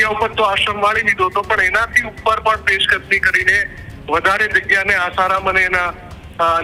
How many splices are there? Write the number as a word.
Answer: zero